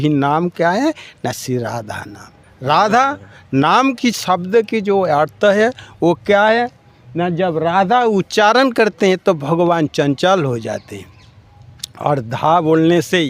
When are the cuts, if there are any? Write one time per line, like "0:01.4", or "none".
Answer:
none